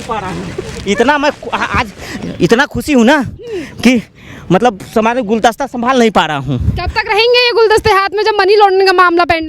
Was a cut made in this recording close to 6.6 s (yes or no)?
no